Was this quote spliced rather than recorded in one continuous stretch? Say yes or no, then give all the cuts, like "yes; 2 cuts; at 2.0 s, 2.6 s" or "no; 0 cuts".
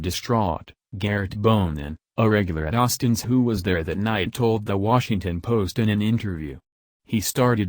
yes; 2 cuts; at 4.3 s, 5.7 s